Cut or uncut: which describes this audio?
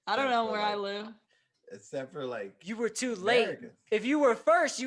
uncut